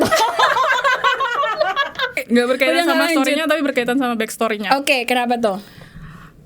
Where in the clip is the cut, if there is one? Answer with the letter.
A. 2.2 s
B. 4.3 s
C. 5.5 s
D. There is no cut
A